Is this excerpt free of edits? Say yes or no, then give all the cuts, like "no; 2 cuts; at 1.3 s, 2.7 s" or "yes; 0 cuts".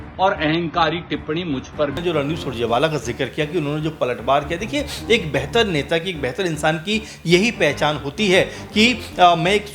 no; 1 cut; at 1.9 s